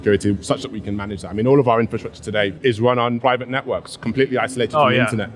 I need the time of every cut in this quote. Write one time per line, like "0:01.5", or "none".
0:02.5